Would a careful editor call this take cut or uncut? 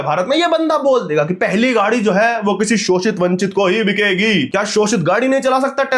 cut